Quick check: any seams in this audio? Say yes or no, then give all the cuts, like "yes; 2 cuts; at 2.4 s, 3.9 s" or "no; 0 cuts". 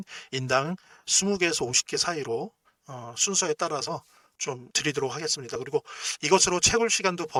no; 0 cuts